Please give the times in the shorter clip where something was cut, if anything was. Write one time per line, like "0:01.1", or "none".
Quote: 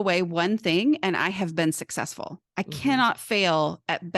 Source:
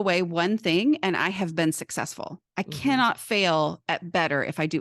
none